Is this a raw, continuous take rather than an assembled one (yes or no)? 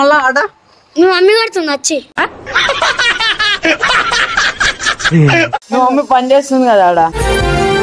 no